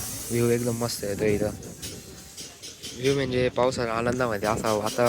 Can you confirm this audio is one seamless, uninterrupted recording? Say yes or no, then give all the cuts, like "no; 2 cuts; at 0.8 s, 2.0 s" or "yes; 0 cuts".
yes; 0 cuts